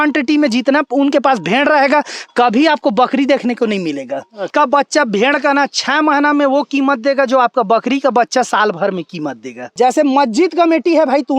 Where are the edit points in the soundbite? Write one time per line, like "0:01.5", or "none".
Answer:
0:04.5
0:09.6